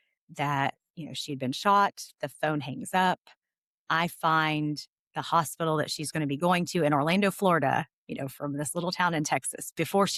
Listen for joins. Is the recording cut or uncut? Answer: uncut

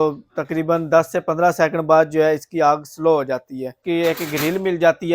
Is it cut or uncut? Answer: cut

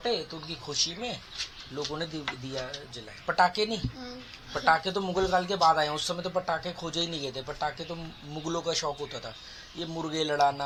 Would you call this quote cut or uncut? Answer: uncut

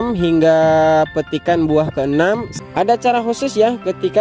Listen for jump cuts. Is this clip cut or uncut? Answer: cut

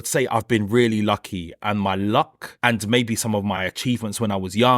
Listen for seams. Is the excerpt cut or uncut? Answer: cut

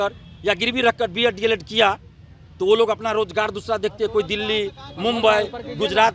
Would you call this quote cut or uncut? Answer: uncut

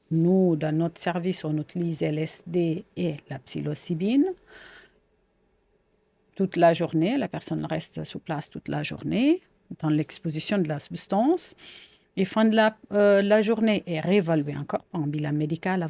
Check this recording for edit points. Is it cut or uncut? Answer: uncut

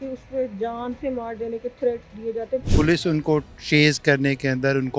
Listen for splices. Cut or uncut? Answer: cut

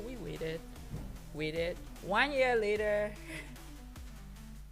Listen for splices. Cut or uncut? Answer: cut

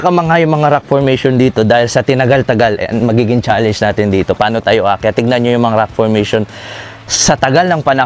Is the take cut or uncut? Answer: uncut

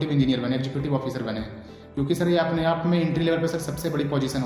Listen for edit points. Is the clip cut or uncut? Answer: uncut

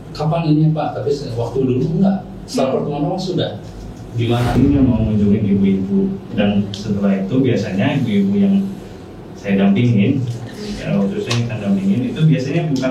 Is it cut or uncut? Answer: cut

